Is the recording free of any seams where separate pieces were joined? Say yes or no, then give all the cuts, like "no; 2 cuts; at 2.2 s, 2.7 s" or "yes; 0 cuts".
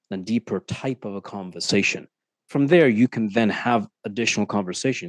yes; 0 cuts